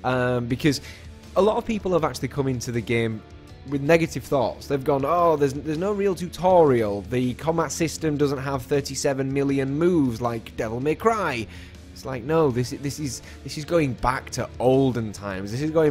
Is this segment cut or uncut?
cut